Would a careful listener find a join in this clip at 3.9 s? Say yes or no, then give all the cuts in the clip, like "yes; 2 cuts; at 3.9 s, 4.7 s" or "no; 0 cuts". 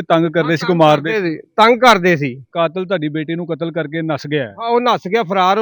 no; 1 cut; at 2.5 s